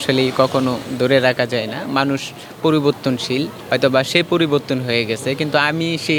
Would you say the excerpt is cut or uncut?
uncut